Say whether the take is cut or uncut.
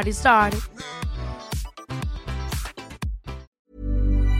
cut